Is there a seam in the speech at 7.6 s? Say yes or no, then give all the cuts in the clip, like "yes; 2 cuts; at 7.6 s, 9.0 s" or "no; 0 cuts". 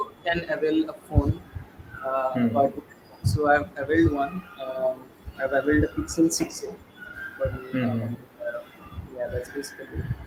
no; 0 cuts